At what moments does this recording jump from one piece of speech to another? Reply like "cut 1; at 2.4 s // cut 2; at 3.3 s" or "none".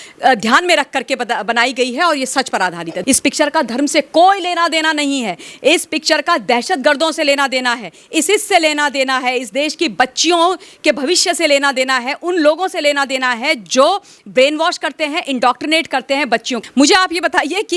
cut 1; at 2.9 s // cut 2; at 16.6 s